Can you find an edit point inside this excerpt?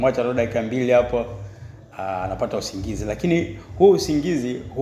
no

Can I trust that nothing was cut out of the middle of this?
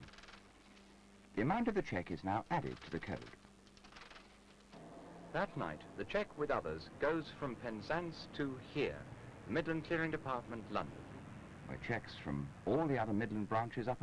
yes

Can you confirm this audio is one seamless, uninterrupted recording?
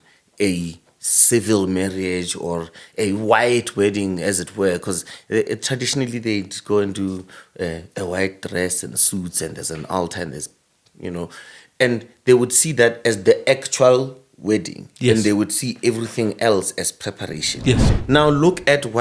no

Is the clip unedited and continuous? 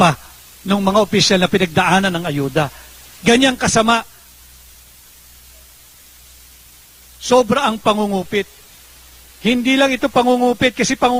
yes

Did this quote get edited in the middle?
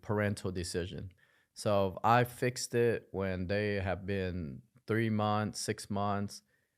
no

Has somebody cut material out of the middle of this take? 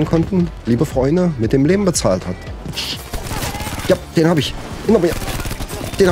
yes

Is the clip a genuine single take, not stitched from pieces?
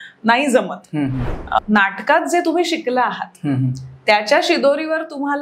no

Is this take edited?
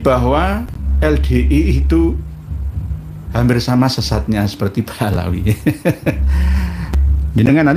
yes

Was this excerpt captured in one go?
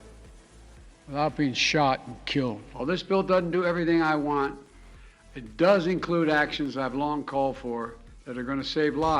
no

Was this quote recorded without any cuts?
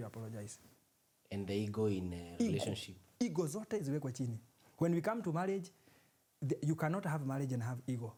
yes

